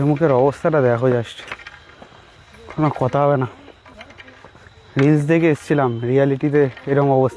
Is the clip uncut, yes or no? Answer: yes